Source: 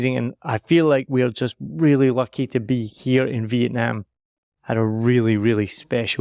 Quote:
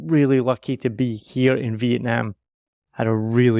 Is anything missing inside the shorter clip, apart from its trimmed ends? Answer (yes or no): no